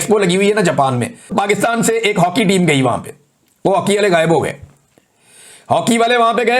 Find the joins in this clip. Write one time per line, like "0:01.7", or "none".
0:01.3